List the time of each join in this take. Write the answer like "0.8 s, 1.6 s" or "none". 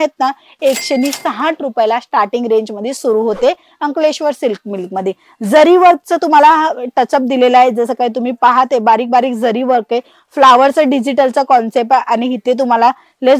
none